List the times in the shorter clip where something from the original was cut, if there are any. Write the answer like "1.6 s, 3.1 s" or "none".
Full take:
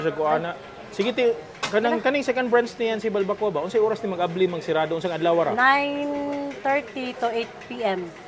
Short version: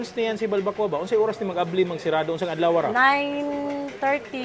none